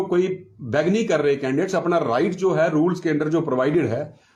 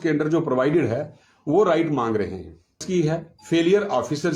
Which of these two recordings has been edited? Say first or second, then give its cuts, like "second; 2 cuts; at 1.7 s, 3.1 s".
second; 1 cut; at 2.8 s